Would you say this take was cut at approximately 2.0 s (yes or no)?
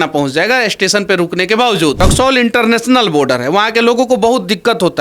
yes